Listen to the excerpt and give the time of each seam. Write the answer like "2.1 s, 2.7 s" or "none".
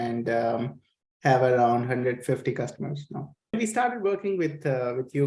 3.5 s